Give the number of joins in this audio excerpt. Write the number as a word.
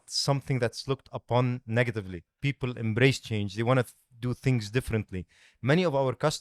zero